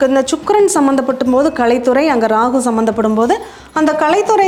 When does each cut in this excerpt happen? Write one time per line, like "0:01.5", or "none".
none